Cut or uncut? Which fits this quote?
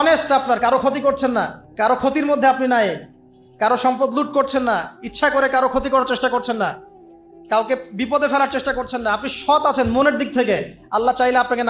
cut